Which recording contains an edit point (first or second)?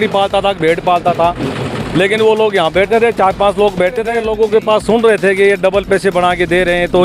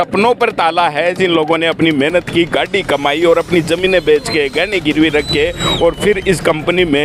first